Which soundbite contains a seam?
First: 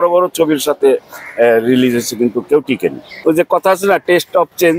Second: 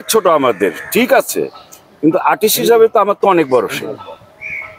first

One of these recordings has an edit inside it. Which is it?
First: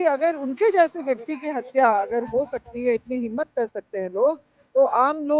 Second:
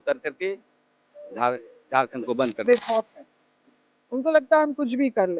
second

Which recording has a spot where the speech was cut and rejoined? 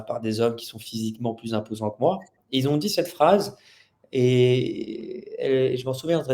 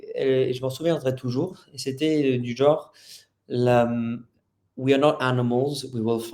first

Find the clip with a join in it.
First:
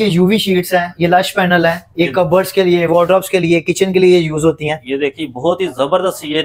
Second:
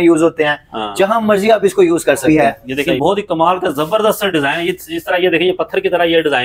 second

